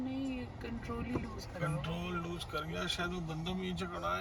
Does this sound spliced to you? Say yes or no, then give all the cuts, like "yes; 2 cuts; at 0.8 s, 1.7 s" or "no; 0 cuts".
no; 0 cuts